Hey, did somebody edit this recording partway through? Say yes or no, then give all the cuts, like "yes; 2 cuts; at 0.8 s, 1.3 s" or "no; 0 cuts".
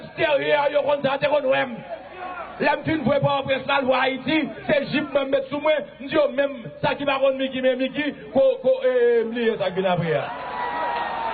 yes; 1 cut; at 4.0 s